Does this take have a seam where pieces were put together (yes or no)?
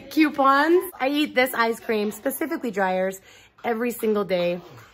yes